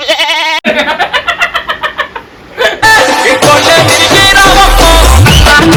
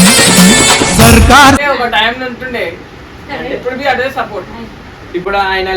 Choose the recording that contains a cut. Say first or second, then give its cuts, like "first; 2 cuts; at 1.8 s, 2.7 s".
second; 1 cut; at 1.6 s